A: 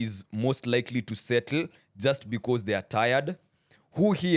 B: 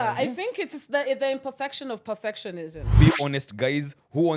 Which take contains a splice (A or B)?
B